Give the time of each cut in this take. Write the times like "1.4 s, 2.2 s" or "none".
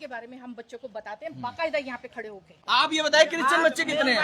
1.3 s, 2.6 s